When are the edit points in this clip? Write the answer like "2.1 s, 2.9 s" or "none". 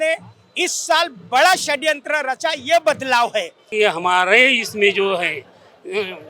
3.6 s